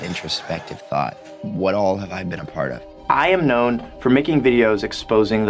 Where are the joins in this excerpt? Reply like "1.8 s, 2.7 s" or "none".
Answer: 1.3 s, 2.9 s